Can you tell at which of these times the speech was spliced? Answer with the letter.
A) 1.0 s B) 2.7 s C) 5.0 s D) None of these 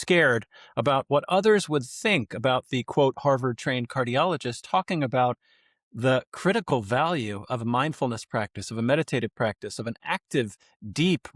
D